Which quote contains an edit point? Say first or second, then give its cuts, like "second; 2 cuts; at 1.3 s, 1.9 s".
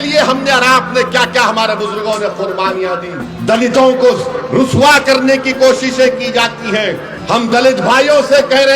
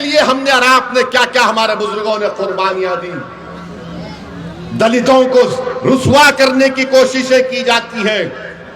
first; 2 cuts; at 3.3 s, 7.1 s